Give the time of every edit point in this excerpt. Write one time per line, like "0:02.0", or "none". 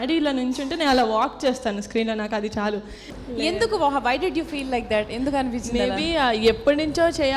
0:03.1